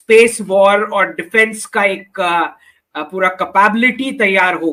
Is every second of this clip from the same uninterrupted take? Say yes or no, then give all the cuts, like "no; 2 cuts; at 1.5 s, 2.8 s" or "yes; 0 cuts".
yes; 0 cuts